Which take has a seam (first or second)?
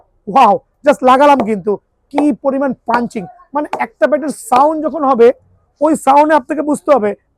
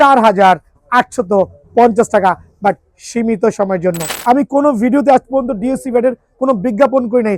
second